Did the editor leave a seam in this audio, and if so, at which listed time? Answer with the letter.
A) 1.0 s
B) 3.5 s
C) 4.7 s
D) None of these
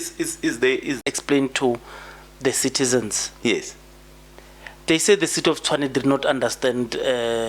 A